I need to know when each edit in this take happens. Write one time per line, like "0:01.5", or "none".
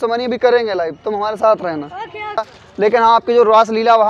0:02.6